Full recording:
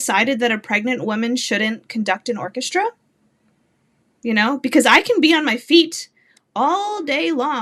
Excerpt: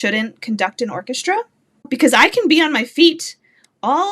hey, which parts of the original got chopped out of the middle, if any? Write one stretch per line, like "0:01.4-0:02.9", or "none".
0:03.3-0:04.6